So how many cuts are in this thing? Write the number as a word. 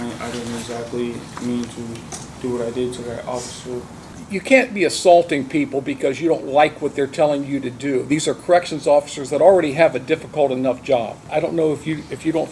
two